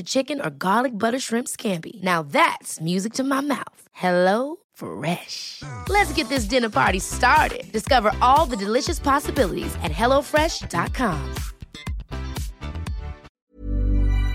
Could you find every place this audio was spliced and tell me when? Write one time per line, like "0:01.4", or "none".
0:13.3